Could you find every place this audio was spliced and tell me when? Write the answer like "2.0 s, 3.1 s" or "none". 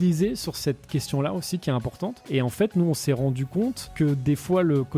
2.3 s, 3.9 s

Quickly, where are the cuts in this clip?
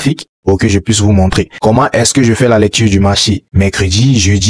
1.5 s

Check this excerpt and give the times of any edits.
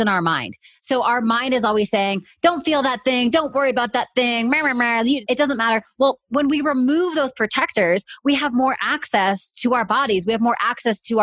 5.2 s

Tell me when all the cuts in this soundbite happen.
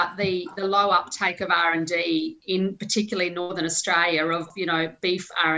4.5 s

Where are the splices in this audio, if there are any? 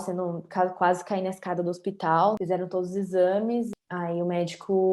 2.4 s, 3.7 s

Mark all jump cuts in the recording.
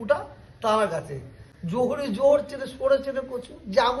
none

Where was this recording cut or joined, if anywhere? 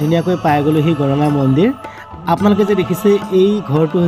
none

